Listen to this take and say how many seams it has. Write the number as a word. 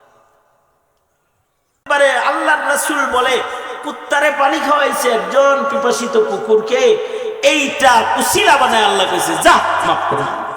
one